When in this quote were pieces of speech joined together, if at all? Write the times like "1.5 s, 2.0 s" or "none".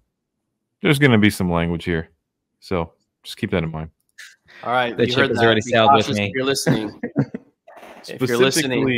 none